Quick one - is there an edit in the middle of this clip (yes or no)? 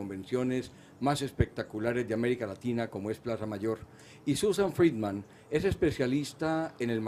yes